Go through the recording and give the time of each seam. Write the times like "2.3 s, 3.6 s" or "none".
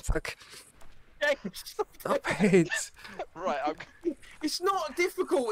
none